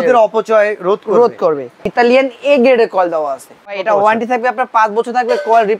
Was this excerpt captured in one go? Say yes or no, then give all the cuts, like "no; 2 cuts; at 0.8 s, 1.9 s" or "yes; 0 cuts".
no; 2 cuts; at 1.9 s, 3.8 s